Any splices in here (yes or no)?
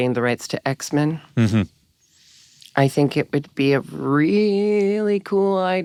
no